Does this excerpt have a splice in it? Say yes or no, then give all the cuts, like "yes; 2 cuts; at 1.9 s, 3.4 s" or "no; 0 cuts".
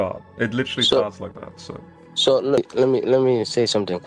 yes; 1 cut; at 2.7 s